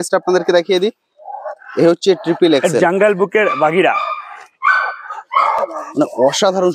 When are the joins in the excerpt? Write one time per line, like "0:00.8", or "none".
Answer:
none